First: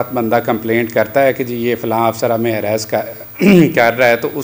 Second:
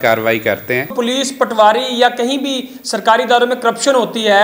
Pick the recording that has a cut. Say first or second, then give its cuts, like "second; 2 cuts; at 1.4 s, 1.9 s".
second; 1 cut; at 1.0 s